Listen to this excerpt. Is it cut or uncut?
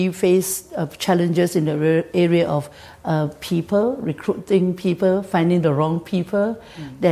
uncut